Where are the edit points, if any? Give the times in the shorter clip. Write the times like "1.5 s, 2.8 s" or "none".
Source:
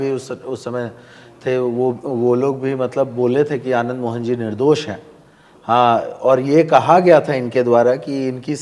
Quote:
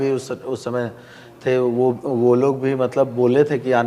none